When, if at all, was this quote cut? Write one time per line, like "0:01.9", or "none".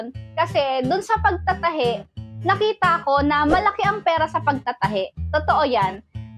none